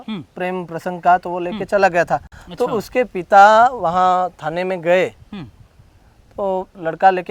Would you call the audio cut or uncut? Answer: uncut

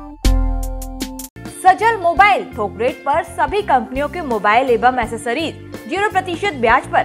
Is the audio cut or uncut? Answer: uncut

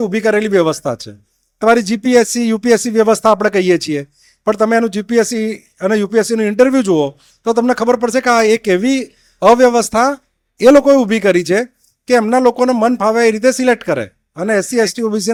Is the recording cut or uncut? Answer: uncut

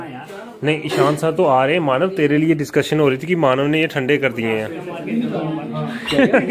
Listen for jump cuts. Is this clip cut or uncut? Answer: cut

